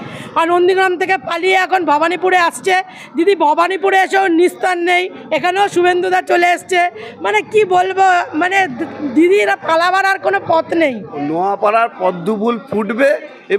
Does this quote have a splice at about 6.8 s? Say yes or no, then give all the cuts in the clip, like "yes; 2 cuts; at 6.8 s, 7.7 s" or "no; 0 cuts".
no; 1 cut; at 11.2 s